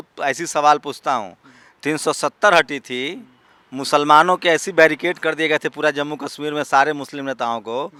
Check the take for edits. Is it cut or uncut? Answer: uncut